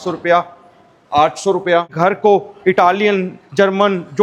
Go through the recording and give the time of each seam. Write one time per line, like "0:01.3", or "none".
0:01.9